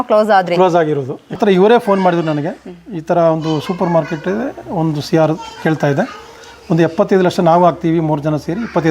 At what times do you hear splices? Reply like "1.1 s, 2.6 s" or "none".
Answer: 1.3 s